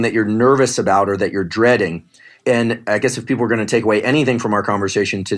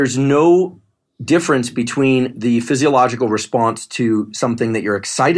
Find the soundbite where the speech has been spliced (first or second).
first